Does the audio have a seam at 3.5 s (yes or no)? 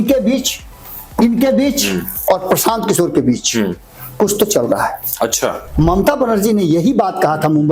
no